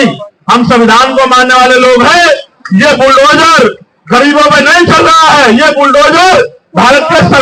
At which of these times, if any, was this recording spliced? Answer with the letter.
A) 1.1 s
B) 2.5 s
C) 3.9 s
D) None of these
D